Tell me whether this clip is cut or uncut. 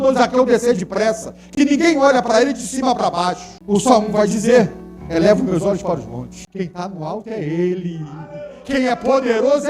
cut